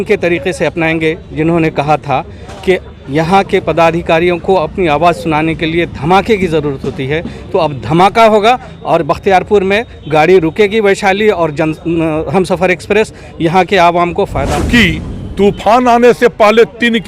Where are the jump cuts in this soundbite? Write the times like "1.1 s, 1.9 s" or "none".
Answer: 14.5 s